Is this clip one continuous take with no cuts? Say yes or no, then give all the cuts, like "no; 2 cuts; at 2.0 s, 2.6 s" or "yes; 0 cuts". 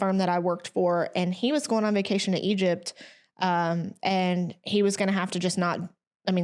yes; 0 cuts